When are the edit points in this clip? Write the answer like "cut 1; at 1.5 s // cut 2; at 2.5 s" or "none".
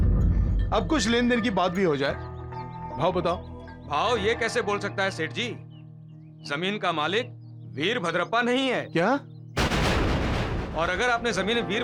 none